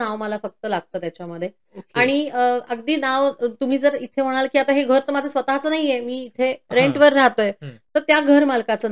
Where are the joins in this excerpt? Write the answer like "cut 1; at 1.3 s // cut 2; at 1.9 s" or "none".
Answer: none